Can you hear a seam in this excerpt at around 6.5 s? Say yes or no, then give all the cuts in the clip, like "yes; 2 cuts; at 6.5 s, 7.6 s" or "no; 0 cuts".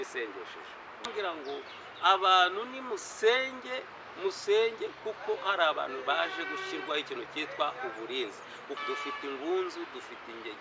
no; 2 cuts; at 1.1 s, 8.8 s